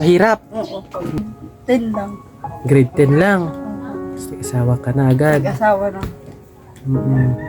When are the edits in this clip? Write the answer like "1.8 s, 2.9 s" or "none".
1.2 s